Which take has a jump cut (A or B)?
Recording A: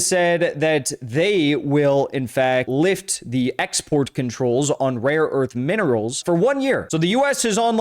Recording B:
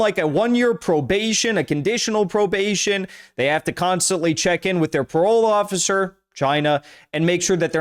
A